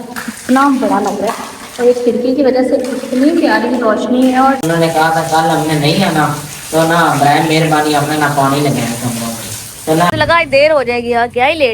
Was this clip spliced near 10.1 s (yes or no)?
yes